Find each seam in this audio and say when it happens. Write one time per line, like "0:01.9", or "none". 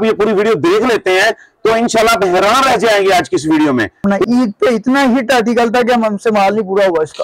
0:04.1